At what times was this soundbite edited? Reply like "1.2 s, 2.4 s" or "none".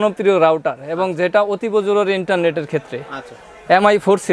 none